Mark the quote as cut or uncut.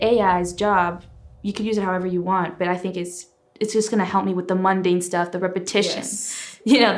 uncut